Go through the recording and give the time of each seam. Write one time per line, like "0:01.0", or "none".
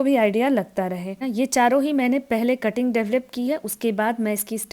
0:01.3